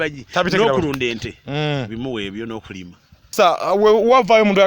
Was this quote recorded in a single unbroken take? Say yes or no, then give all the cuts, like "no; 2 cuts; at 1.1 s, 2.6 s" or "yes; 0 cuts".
no; 1 cut; at 3.3 s